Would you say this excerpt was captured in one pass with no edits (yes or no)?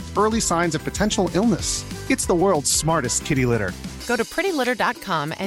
yes